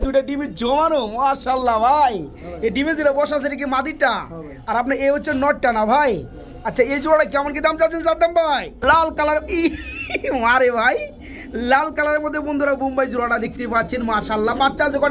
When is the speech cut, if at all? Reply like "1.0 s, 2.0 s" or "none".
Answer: 8.7 s